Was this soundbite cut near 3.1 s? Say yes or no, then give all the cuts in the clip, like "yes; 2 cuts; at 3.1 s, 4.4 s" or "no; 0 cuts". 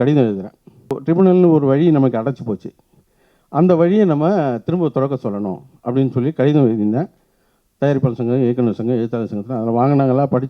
no; 1 cut; at 1.0 s